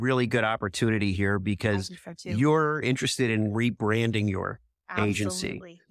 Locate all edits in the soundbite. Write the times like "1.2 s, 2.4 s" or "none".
2.8 s